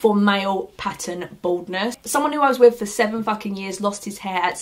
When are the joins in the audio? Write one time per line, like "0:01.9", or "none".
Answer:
none